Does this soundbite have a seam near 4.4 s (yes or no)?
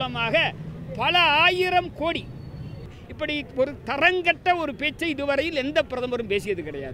no